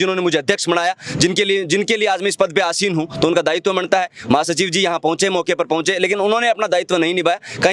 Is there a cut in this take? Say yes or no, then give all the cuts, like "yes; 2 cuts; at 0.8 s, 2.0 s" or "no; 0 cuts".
no; 0 cuts